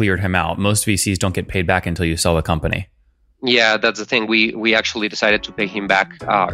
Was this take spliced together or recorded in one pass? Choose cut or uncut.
uncut